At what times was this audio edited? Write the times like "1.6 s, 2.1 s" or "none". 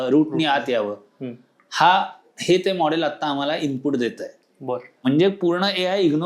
4.8 s